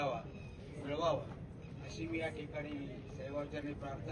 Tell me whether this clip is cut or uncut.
uncut